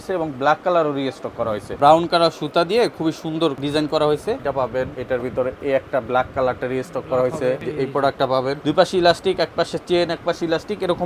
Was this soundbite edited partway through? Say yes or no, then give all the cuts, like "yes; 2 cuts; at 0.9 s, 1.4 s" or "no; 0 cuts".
yes; 5 cuts; at 1.8 s, 3.6 s, 4.8 s, 7.6 s, 8.6 s